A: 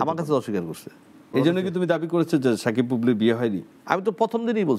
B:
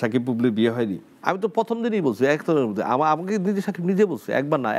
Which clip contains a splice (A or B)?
A